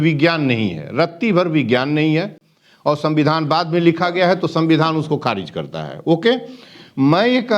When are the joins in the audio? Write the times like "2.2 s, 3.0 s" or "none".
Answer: none